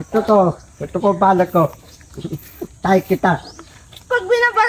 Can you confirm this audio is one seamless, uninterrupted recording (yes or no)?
yes